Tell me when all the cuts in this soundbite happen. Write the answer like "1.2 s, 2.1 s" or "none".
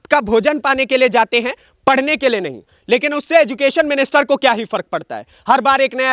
none